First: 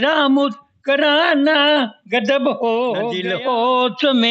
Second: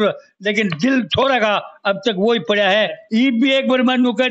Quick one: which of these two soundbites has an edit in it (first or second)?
first